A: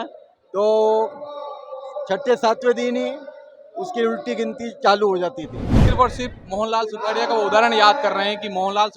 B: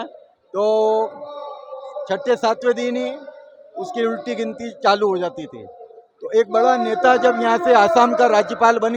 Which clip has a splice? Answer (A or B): A